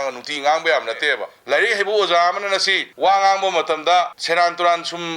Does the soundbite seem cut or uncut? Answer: cut